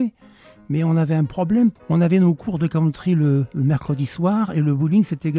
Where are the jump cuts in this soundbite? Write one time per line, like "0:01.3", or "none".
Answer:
0:01.8